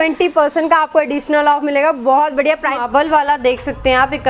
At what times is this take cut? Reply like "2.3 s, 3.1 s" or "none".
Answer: 2.8 s